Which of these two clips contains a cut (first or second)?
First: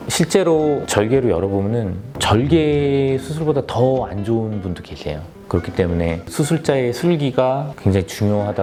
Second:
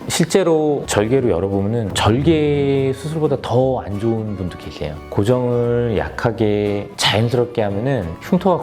second